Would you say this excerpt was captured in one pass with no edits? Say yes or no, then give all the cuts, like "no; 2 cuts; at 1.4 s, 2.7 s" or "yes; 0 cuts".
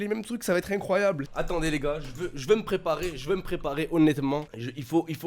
no; 1 cut; at 1.2 s